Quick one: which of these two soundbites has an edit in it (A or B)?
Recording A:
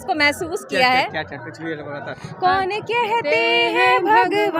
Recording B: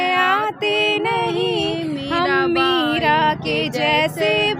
A